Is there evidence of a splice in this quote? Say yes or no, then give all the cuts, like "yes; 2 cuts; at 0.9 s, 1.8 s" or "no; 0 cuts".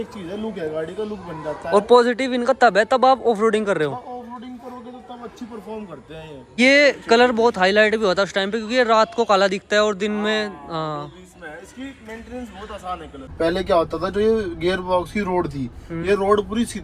yes; 2 cuts; at 6.6 s, 13.2 s